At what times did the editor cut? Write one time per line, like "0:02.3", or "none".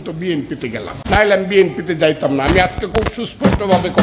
0:01.0